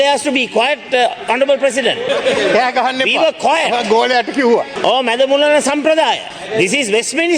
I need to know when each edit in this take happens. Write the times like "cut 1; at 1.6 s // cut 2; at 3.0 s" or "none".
cut 1; at 2.0 s // cut 2; at 4.7 s // cut 3; at 6.3 s

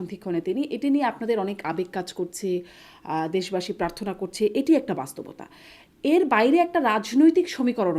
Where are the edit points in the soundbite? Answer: none

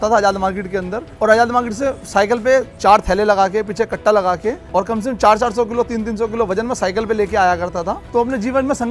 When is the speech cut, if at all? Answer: cut 1; at 1.0 s // cut 2; at 2.7 s // cut 3; at 4.6 s // cut 4; at 8.0 s

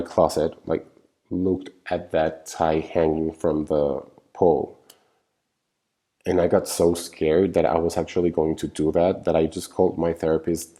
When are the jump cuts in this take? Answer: none

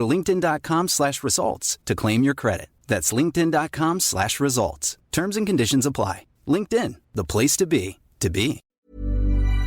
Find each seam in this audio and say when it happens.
cut 1; at 8.6 s

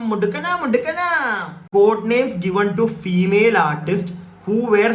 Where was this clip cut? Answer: cut 1; at 1.7 s

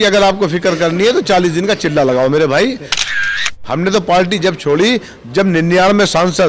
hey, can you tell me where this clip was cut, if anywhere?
cut 1; at 3.2 s

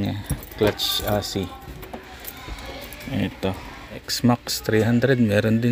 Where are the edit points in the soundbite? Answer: cut 1; at 4.1 s

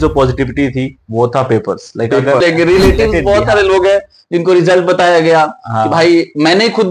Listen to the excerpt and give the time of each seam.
cut 1; at 2.4 s

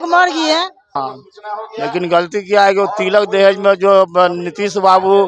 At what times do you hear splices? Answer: cut 1; at 1.0 s

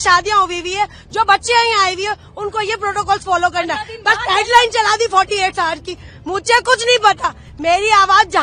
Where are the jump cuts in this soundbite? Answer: none

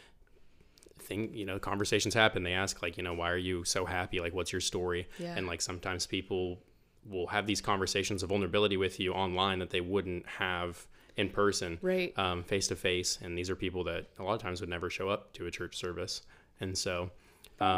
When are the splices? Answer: none

